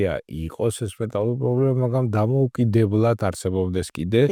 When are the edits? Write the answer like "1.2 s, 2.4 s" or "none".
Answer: none